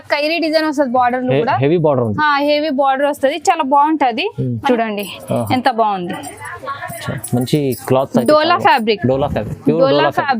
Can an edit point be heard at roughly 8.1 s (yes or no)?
no